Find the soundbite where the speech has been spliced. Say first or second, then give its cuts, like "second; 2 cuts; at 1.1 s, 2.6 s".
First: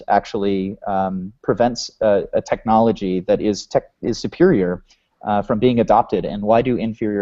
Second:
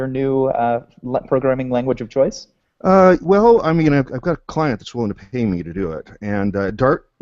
second; 1 cut; at 5.8 s